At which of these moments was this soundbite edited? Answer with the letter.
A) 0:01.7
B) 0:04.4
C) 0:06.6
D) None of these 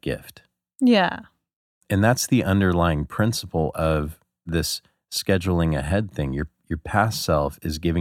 B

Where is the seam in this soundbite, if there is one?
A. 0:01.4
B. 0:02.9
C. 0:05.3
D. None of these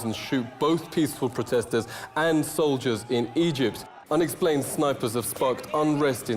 A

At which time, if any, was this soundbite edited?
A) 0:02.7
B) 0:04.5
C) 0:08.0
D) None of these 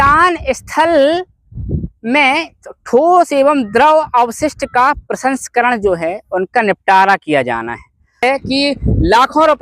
C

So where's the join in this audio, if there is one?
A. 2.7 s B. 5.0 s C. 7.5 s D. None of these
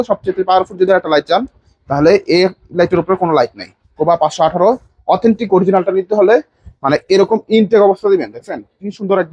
D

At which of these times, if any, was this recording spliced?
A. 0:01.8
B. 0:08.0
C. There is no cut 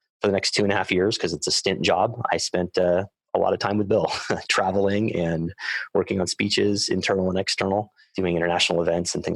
B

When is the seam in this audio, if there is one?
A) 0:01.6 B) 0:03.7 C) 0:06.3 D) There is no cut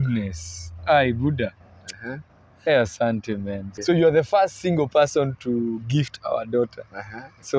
B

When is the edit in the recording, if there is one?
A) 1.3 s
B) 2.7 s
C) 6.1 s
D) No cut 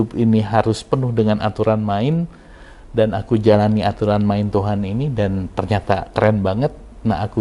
D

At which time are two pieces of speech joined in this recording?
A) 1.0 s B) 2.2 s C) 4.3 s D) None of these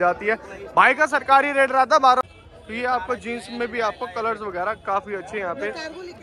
B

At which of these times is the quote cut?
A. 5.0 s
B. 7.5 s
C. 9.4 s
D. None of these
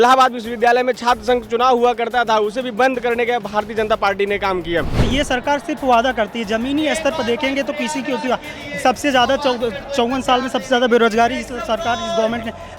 A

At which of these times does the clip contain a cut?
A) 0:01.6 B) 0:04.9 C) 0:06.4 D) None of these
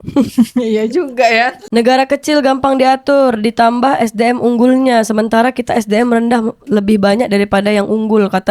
A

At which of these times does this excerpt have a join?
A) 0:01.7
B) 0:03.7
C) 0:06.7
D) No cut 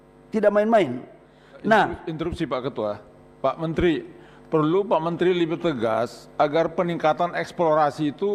D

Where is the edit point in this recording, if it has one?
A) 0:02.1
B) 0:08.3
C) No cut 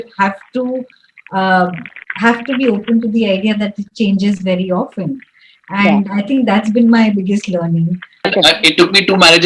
B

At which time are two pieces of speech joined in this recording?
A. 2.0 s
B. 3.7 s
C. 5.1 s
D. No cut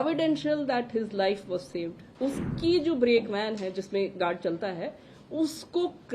A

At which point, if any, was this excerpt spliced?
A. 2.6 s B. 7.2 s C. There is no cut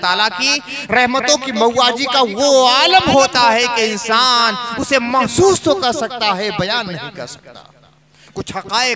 C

